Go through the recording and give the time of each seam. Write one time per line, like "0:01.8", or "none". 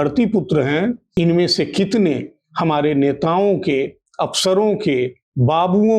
0:01.0

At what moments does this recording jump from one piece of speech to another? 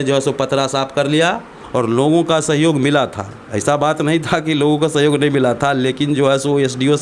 0:01.5

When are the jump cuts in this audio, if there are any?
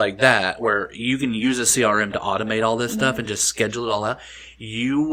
none

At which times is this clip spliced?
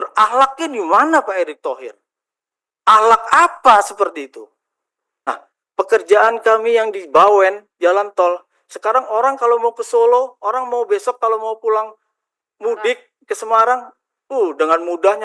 0:05.3

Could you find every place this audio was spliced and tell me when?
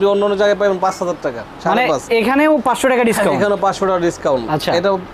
none

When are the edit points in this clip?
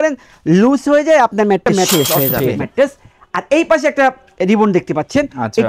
0:02.6

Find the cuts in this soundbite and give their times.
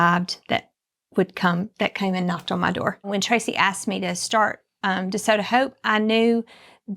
0:03.0

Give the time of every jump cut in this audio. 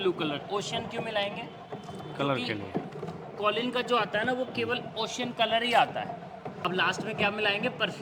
0:06.6

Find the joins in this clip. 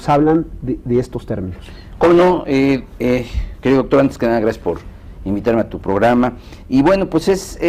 0:01.2

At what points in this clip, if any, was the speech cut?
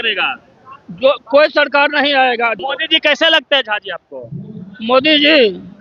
0:02.6

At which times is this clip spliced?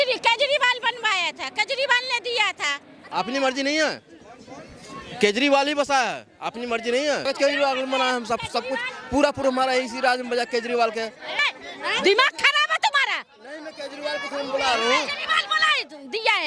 0:03.0
0:07.3
0:11.4

